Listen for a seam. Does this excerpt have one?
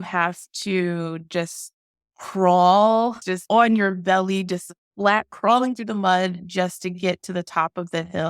yes; 1 cut; at 3.3 s

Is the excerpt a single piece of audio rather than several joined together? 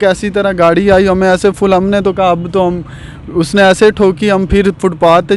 yes; 0 cuts

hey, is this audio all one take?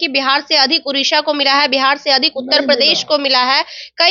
yes; 0 cuts

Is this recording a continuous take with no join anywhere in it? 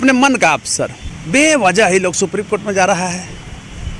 no; 1 cut; at 1.0 s

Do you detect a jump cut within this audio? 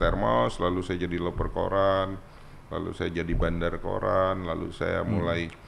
no; 0 cuts

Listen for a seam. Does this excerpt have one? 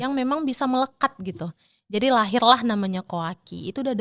no; 0 cuts

